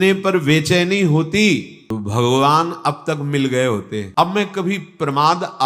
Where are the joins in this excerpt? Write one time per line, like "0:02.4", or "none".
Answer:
0:04.1